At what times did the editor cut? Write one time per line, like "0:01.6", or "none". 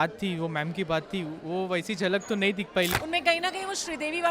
0:02.9